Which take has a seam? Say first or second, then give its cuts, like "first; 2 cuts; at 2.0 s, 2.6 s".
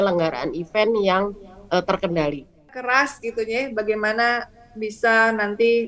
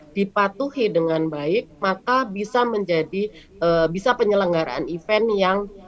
first; 1 cut; at 2.8 s